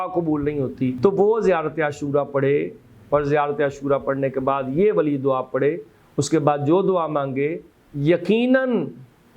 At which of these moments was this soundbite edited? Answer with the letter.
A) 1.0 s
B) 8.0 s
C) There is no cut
A